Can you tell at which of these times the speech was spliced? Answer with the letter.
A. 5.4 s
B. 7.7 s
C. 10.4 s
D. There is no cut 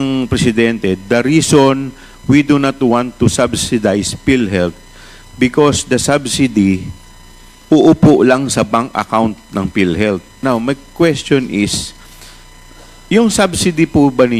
C